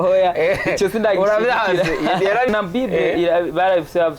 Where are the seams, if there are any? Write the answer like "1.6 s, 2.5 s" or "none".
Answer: 2.5 s